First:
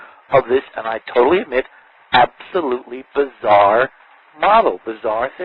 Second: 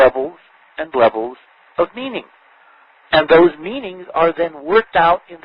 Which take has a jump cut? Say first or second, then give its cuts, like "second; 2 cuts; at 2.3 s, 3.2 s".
first; 1 cut; at 3.3 s